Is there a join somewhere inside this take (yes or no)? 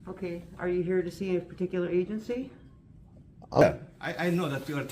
yes